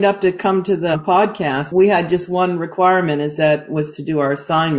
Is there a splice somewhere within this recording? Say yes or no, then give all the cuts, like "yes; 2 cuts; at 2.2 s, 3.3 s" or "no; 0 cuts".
yes; 1 cut; at 1.4 s